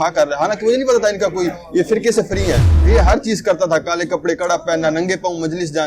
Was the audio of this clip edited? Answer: yes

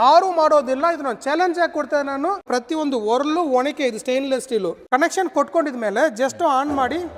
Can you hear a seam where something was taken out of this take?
yes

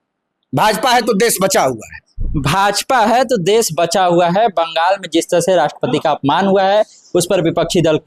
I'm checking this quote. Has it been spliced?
no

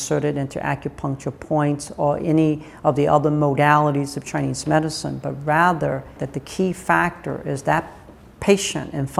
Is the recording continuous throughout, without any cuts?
yes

